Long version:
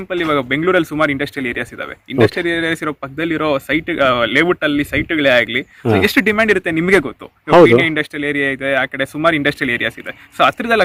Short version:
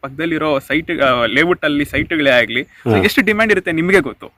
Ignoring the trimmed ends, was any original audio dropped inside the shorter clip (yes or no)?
no